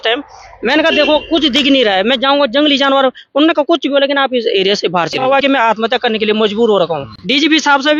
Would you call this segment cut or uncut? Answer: cut